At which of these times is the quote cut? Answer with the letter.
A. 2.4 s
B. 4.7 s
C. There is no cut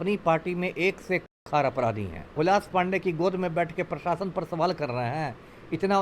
A